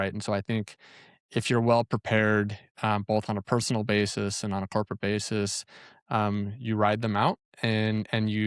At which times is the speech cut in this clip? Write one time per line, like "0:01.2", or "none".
none